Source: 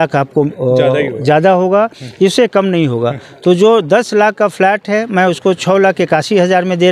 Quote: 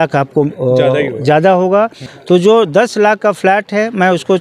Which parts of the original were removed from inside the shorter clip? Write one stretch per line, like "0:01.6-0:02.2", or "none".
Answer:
0:02.0-0:03.2